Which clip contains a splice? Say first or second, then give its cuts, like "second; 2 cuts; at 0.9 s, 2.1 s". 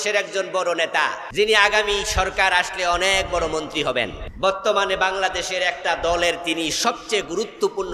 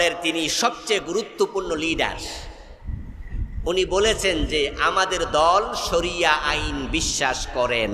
first; 2 cuts; at 1.2 s, 4.2 s